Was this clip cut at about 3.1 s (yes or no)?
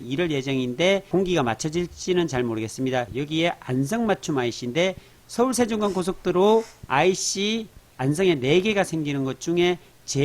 yes